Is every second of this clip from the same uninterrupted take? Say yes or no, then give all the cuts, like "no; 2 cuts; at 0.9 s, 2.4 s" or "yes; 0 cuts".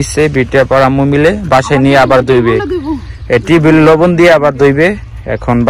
yes; 0 cuts